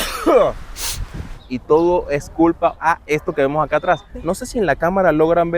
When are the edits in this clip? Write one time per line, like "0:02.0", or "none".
0:00.9
0:02.8
0:04.1